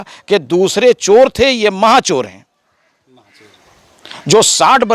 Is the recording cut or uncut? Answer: uncut